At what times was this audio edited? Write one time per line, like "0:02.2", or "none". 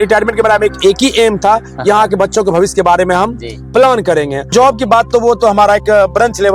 0:04.5